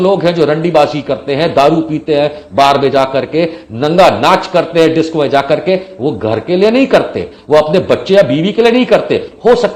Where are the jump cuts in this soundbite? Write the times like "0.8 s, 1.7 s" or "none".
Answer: none